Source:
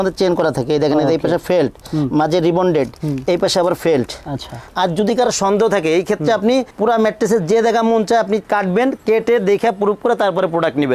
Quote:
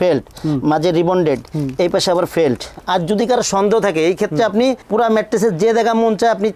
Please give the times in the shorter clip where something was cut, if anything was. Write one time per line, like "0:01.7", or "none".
0:02.7

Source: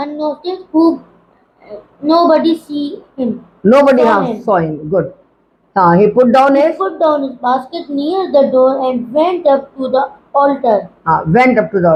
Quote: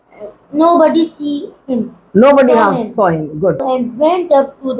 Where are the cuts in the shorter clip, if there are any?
0:03.6

